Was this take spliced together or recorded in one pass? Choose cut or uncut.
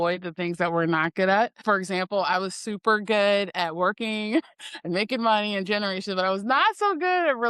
cut